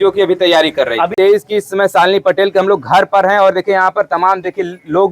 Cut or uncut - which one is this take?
cut